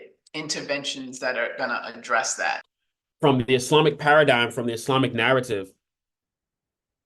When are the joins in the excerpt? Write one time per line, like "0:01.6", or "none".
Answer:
0:02.7